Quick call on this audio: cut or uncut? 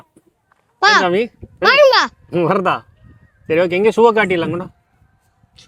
uncut